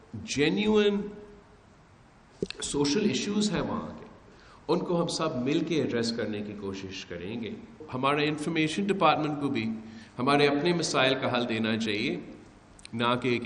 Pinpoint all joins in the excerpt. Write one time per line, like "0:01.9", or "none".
0:07.8